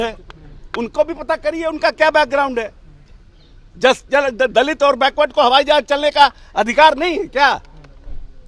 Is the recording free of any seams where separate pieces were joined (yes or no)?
yes